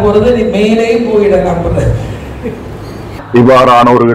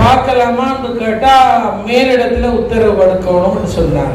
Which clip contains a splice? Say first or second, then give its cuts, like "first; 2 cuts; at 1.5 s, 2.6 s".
first; 1 cut; at 3.1 s